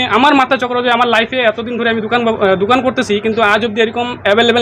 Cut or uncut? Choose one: uncut